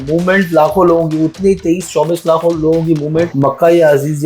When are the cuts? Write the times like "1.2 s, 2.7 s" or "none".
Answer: 3.3 s